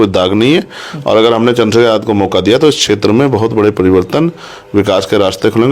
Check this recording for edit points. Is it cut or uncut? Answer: uncut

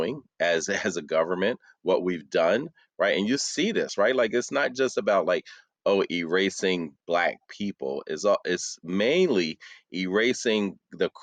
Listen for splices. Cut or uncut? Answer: uncut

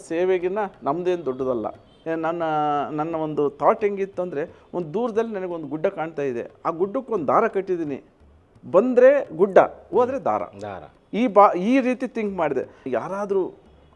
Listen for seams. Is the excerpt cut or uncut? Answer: cut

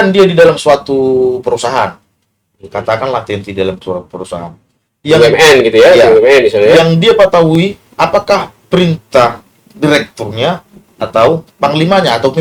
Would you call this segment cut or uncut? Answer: uncut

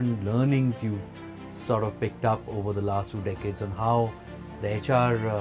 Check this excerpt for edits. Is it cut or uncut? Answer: uncut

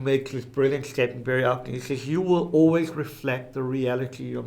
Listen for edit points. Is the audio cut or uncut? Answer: uncut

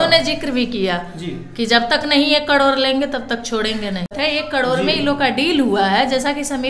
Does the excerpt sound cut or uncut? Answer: cut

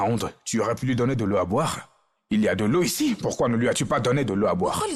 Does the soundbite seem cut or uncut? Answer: uncut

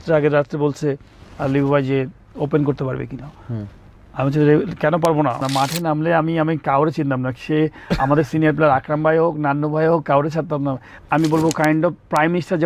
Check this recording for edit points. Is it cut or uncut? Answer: cut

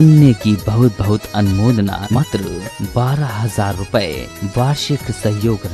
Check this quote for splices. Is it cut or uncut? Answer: cut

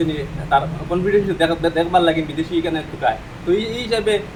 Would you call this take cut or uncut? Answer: uncut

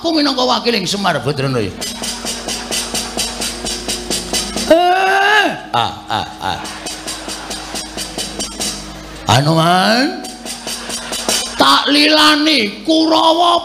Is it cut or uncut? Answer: uncut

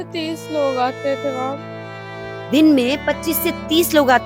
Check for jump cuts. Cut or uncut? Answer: uncut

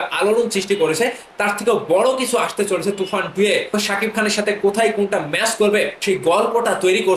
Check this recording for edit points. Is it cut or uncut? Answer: cut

